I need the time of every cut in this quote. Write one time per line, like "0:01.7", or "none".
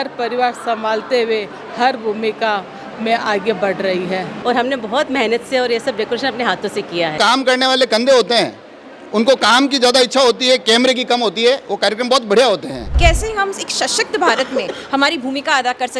0:04.3
0:07.2
0:12.9